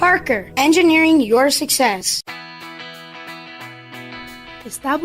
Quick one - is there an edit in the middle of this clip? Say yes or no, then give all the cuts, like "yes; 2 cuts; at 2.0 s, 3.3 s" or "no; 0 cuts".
yes; 1 cut; at 2.1 s